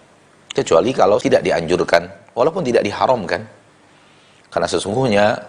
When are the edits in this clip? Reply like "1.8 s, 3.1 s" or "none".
1.2 s